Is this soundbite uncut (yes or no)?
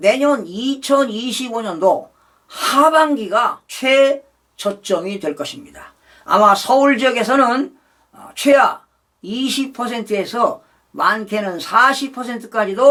yes